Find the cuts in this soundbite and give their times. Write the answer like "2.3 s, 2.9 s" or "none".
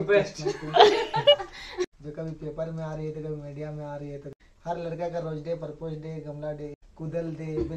1.9 s, 4.2 s, 6.8 s